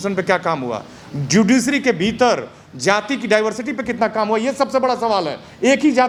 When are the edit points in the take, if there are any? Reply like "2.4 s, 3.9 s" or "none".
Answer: none